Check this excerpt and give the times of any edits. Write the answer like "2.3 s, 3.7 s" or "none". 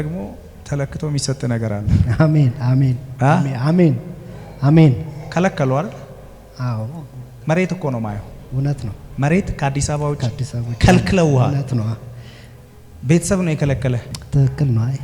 14.1 s